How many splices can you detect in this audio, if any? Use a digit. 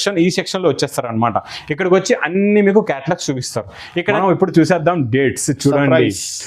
1